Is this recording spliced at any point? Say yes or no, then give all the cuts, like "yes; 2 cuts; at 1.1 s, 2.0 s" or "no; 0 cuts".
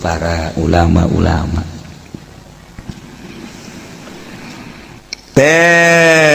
yes; 1 cut; at 3.9 s